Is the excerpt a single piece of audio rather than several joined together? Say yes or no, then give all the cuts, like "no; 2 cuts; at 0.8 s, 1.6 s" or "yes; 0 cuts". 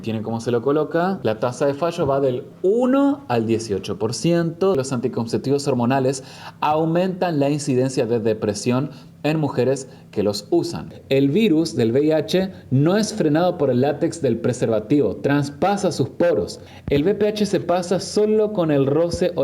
no; 3 cuts; at 4.8 s, 10.9 s, 16.6 s